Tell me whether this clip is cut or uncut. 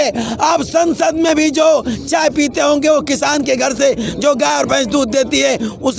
uncut